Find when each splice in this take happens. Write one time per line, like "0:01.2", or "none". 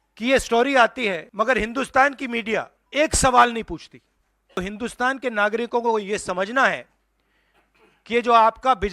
0:01.3
0:02.8
0:04.6